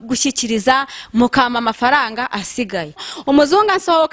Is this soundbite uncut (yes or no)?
no